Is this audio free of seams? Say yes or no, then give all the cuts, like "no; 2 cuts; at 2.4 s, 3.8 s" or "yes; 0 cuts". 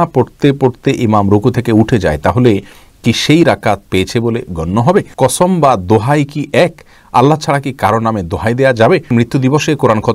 no; 2 cuts; at 5.1 s, 9.1 s